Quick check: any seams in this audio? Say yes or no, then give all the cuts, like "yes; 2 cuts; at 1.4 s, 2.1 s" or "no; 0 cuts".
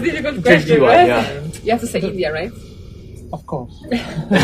yes; 1 cut; at 1.5 s